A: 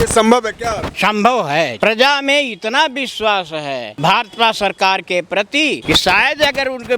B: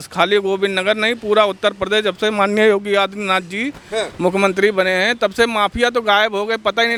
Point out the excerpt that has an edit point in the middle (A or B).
A